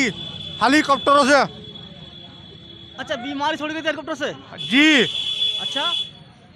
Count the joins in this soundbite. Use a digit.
0